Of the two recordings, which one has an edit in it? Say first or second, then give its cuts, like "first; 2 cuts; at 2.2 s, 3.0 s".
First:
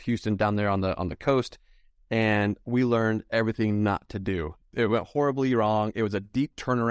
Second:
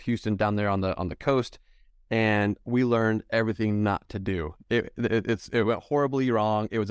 first; 1 cut; at 4.6 s